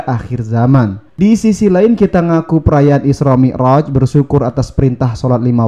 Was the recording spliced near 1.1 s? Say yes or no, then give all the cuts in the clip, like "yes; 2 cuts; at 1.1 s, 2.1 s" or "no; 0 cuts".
yes; 1 cut; at 1.1 s